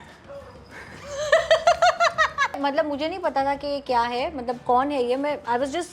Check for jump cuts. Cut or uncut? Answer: cut